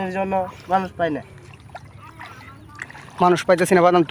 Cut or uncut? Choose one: cut